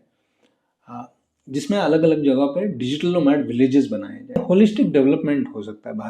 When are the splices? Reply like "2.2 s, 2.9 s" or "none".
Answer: 4.4 s